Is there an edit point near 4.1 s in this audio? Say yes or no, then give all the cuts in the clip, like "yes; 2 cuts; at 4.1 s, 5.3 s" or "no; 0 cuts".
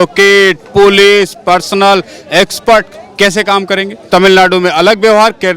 yes; 1 cut; at 4.1 s